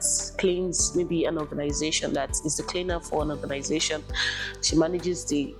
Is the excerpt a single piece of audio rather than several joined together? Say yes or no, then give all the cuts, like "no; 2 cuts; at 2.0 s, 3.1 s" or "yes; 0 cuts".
yes; 0 cuts